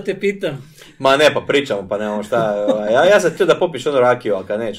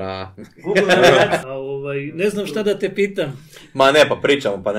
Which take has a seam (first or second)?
second